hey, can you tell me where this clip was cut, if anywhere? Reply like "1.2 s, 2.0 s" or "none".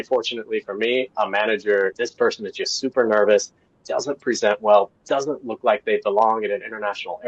1.9 s